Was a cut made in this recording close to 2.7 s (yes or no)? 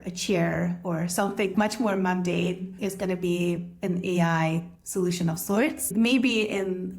no